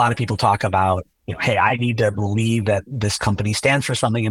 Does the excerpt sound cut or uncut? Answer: cut